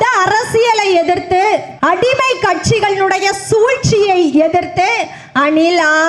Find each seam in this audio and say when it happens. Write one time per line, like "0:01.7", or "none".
0:01.7

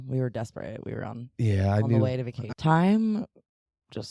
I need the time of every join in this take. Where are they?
0:02.4

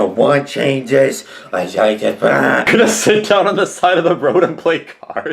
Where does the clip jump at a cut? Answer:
0:02.7

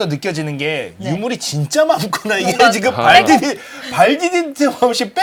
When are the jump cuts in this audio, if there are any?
none

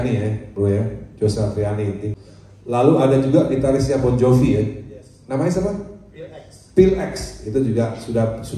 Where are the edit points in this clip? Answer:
0:02.1

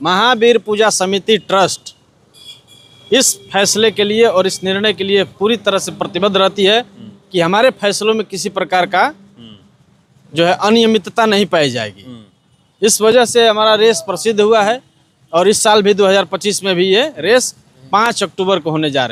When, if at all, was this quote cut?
none

